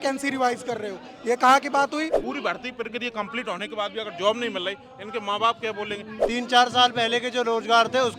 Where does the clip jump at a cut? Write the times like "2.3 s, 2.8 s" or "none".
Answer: 2.2 s, 6.1 s